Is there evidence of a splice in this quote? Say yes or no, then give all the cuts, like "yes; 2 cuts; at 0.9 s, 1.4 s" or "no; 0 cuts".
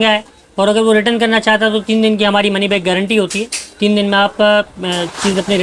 no; 0 cuts